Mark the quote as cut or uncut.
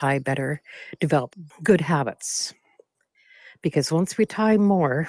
cut